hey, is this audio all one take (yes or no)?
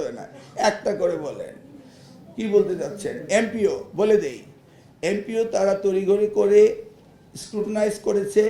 yes